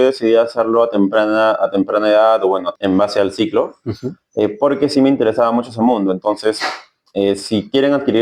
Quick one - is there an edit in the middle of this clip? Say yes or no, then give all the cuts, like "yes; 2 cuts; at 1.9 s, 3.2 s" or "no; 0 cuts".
yes; 1 cut; at 2.7 s